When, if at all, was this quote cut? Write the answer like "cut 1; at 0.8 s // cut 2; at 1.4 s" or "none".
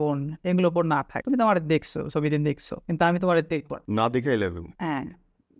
cut 1; at 1.1 s // cut 2; at 2.7 s // cut 3; at 3.8 s // cut 4; at 4.7 s